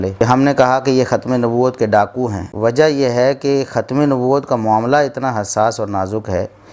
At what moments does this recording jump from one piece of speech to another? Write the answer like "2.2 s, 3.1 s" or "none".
2.4 s